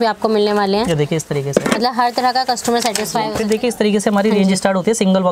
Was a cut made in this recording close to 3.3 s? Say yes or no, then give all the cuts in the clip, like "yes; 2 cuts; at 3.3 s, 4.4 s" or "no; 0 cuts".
yes; 1 cut; at 3.3 s